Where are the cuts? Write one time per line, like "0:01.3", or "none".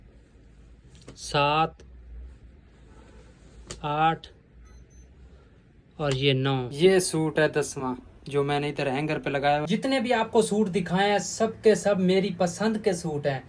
0:06.7
0:09.7